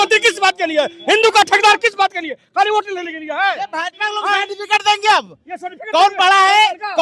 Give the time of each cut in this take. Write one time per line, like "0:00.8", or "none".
none